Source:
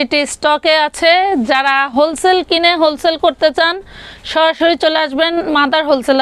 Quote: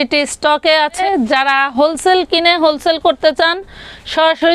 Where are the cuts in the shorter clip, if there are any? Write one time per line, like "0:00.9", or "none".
0:01.0